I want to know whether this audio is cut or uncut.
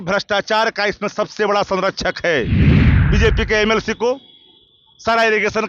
cut